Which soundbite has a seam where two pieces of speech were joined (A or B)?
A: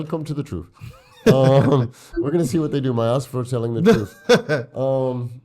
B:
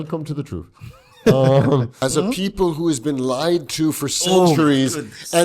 B